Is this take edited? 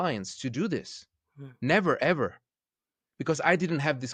no; 0 cuts

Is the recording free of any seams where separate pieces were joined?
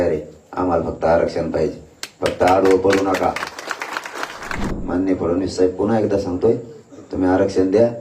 no; 1 cut; at 4.7 s

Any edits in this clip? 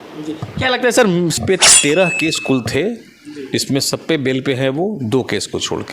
yes; 1 cut; at 1.4 s

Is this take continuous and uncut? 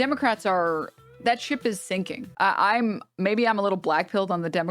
no; 1 cut; at 2.3 s

